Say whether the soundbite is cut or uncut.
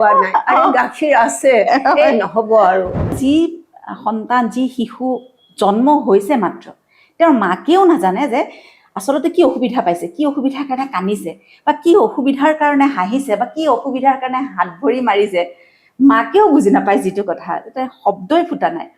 cut